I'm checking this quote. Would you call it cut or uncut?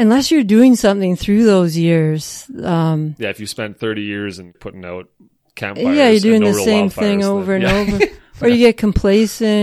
cut